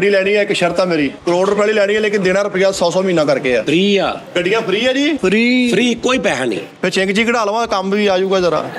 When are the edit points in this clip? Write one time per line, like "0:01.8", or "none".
0:01.2
0:03.6
0:04.2
0:05.2

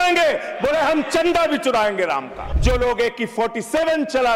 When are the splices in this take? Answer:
0:02.5

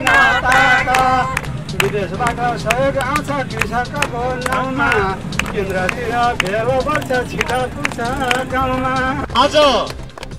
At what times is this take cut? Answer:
0:09.2

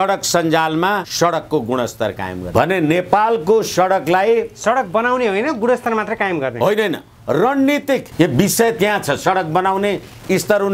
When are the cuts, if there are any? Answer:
0:01.1
0:02.4
0:08.1

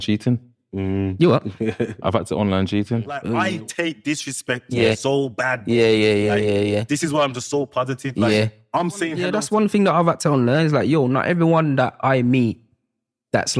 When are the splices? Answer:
0:03.3
0:09.3

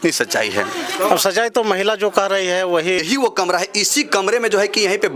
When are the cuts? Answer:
0:03.0

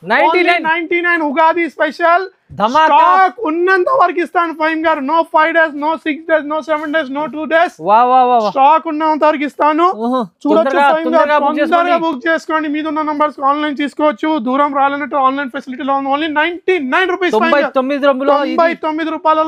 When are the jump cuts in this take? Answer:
none

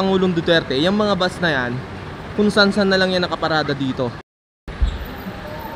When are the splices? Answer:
0:04.3

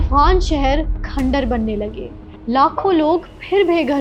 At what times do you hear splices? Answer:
none

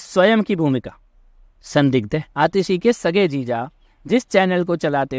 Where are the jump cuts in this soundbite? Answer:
0:02.3

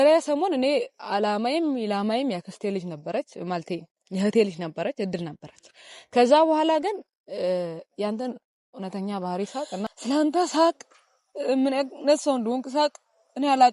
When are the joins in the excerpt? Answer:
0:09.9

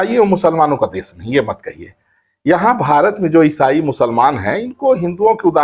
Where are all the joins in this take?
none

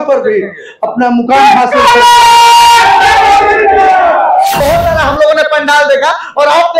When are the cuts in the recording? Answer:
0:04.6

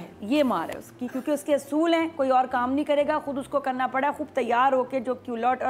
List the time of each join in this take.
none

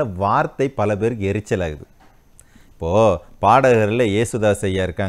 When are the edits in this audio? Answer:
none

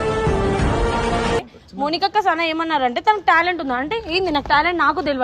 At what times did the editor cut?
0:01.4

